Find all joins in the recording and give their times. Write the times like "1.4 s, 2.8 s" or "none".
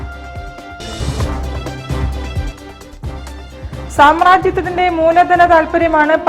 3.3 s